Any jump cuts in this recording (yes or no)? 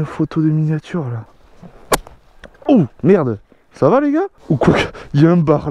yes